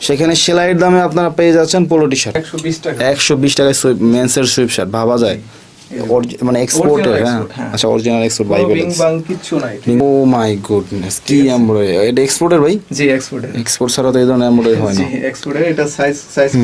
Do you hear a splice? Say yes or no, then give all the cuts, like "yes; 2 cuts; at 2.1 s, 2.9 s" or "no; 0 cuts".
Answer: yes; 2 cuts; at 2.4 s, 10.0 s